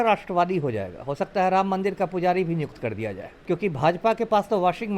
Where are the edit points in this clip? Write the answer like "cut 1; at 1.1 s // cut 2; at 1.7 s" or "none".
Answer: cut 1; at 3.3 s